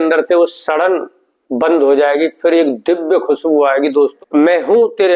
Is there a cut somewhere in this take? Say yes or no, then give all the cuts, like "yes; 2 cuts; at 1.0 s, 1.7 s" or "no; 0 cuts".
yes; 1 cut; at 4.1 s